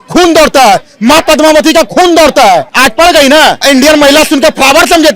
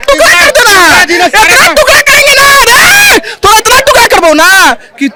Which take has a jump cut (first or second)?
first